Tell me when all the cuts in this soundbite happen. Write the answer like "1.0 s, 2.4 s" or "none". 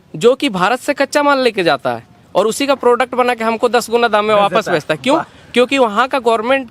none